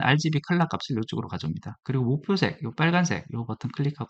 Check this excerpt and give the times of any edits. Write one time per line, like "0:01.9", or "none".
none